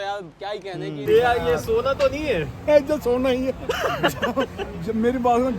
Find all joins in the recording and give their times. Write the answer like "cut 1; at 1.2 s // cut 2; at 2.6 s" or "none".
cut 1; at 1.0 s